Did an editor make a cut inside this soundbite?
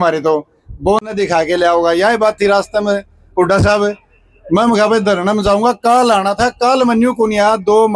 no; 0 cuts

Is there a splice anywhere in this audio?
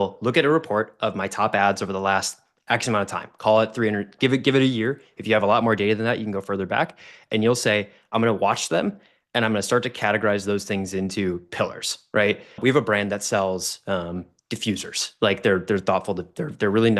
yes; 1 cut; at 12.6 s

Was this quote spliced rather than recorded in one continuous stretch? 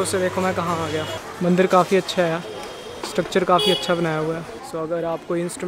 yes; 2 cuts; at 1.3 s, 4.6 s

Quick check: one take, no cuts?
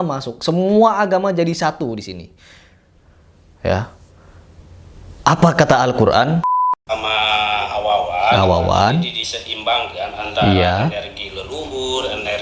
no; 1 cut; at 6.4 s

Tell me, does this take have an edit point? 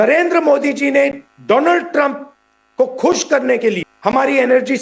yes; 2 cuts; at 1.3 s, 3.9 s

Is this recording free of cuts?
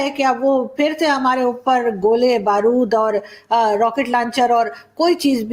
yes; 0 cuts

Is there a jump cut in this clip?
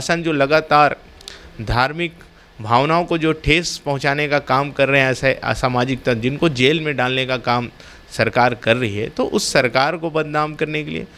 no; 0 cuts

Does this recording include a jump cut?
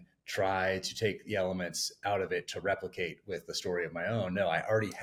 no; 0 cuts

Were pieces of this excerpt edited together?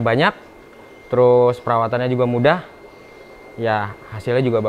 no; 0 cuts

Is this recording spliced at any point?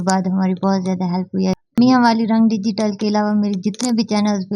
yes; 1 cut; at 1.6 s

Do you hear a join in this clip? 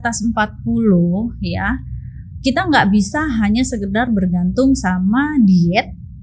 no; 0 cuts

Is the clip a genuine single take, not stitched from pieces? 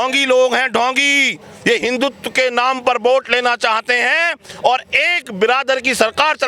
yes; 0 cuts

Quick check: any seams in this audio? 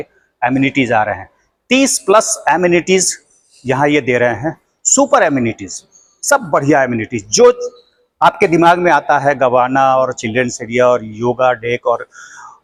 no; 0 cuts

